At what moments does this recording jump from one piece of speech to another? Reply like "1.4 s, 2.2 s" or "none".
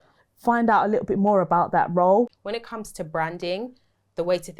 2.4 s